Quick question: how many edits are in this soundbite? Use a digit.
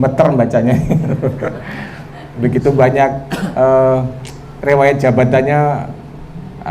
0